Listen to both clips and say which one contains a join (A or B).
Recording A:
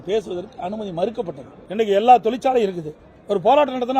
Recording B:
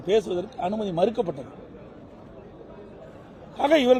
A